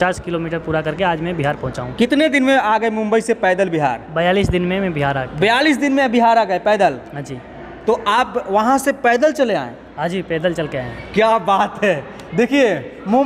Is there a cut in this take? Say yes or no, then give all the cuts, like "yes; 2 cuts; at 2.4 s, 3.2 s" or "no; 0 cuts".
no; 0 cuts